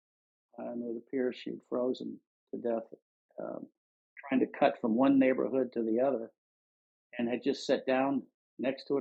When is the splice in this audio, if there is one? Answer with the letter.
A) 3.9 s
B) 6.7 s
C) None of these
C